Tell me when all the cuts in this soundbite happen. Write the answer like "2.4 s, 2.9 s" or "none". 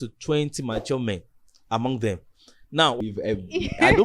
3.0 s